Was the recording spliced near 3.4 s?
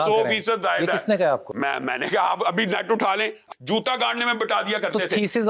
yes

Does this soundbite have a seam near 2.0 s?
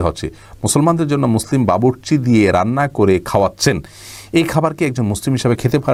no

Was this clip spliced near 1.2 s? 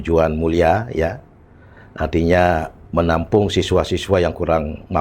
no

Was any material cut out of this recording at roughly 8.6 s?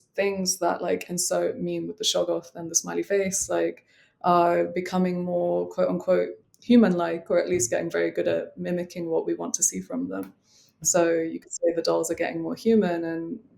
no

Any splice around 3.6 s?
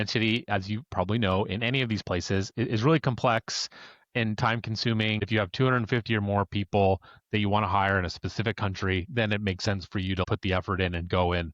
no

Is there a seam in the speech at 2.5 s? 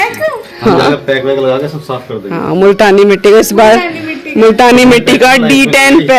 no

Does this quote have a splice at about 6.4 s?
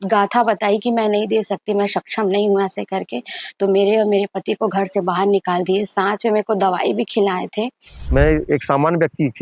no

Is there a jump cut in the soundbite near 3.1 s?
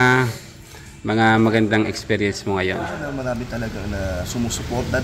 yes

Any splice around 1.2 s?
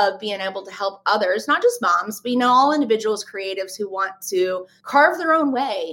no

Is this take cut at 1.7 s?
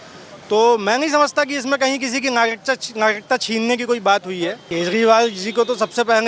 no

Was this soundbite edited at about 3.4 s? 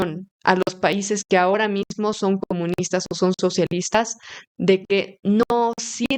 no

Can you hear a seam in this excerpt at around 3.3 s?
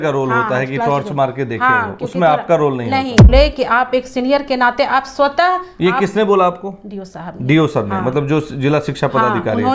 yes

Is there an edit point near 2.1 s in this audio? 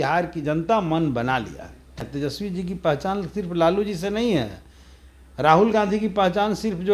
yes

